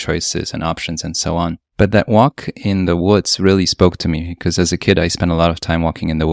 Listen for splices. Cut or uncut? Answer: uncut